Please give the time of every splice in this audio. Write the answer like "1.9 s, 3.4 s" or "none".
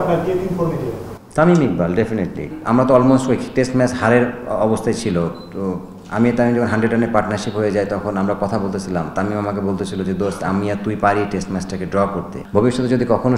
2.5 s, 12.4 s